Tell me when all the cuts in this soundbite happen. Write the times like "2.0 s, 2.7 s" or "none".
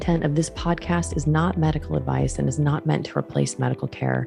none